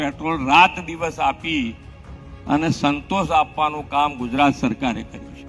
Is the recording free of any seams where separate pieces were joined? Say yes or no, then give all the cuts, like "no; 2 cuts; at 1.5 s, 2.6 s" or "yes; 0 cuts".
yes; 0 cuts